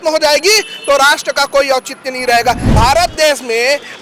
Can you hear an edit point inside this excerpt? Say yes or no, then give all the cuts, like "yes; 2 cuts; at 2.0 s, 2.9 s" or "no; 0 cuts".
yes; 1 cut; at 2.7 s